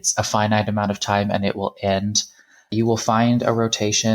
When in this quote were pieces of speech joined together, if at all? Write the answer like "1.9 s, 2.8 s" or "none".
2.7 s